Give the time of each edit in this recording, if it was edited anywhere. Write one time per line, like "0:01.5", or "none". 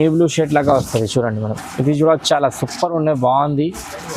none